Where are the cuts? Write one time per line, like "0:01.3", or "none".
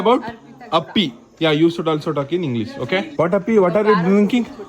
0:03.1